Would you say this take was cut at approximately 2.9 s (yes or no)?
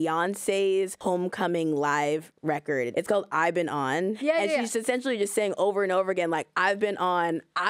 yes